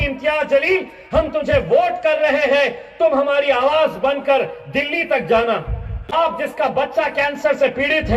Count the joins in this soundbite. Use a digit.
1